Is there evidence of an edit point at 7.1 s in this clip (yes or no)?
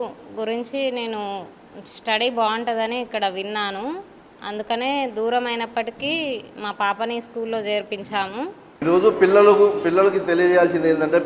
no